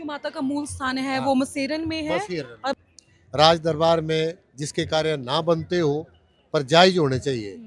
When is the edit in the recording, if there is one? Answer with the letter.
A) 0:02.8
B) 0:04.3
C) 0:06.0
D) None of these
A